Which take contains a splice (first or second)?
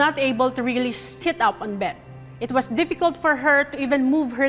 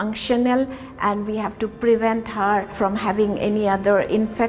second